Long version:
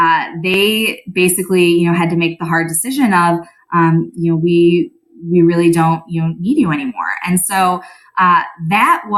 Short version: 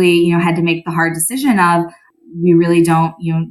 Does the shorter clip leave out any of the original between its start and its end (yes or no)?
yes